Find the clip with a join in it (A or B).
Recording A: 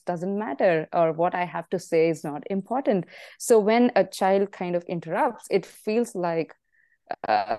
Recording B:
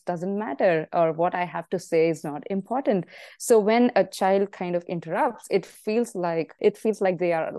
B